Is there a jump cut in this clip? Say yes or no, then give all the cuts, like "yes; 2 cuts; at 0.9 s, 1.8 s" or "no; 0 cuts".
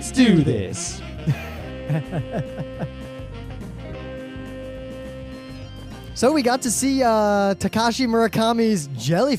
no; 0 cuts